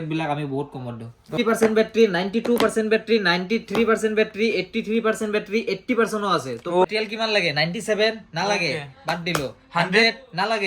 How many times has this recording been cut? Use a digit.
2